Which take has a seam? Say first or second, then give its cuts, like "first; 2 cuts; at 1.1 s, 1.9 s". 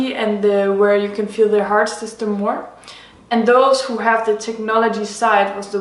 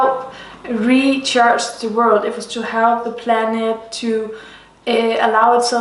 first; 1 cut; at 4.8 s